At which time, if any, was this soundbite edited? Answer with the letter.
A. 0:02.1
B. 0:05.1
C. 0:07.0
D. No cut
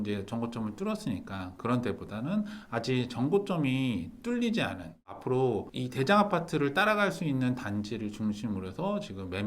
B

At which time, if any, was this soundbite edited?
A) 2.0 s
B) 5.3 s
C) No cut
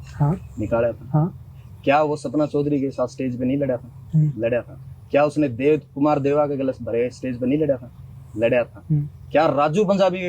C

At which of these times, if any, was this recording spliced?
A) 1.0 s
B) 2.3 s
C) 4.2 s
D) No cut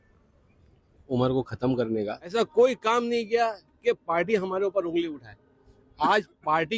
B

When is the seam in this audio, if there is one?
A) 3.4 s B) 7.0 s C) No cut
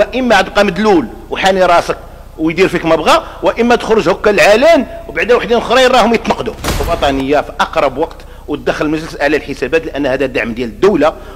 B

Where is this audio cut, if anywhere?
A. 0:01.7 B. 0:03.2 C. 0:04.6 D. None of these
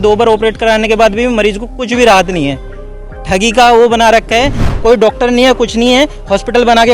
C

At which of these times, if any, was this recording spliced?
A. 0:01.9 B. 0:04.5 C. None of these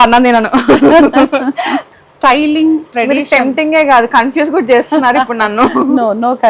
A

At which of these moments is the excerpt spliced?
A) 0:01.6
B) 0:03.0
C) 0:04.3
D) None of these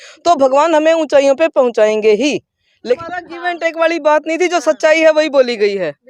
B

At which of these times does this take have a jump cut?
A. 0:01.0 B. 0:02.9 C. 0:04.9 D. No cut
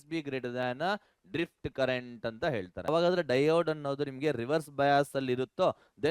B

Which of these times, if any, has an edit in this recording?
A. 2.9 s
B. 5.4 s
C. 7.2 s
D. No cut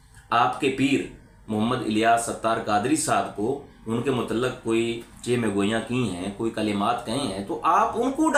D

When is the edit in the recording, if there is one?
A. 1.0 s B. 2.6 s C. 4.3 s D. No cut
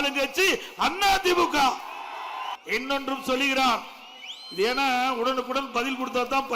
B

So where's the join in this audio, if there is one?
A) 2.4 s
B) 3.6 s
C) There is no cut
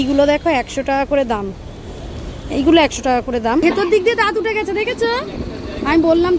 B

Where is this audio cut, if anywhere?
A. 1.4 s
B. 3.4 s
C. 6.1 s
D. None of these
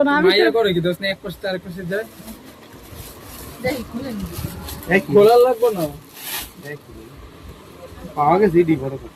D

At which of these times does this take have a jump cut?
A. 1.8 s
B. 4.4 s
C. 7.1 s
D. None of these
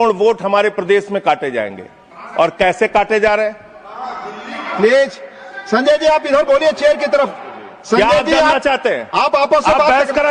D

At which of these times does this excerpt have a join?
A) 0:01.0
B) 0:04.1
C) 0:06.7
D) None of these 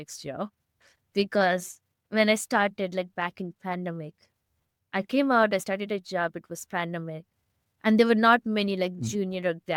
D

